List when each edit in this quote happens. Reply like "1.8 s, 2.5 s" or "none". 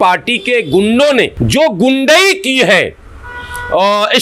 1.4 s

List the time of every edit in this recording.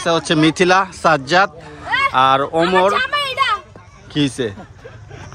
none

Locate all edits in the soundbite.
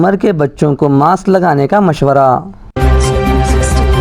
2.7 s

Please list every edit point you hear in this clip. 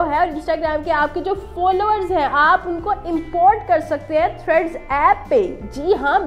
none

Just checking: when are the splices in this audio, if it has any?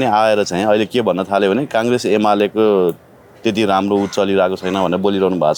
none

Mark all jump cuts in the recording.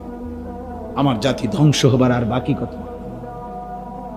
1.0 s, 2.6 s

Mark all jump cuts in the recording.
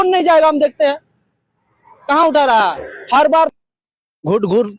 3.5 s

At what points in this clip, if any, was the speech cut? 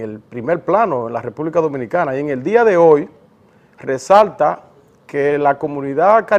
2.4 s

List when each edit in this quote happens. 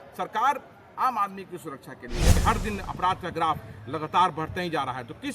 2.4 s

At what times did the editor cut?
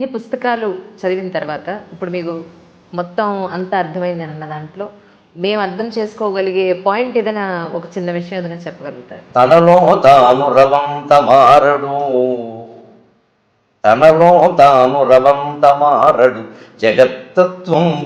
9.1 s

